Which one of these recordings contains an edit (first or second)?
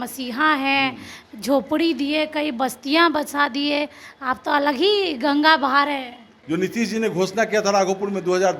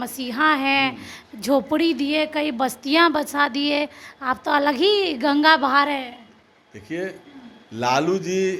first